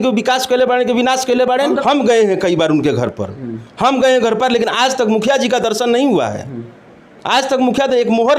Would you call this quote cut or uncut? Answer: cut